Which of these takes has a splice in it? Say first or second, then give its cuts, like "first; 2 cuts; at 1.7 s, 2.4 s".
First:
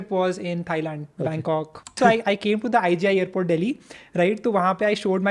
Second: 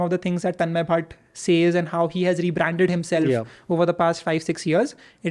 first; 1 cut; at 1.9 s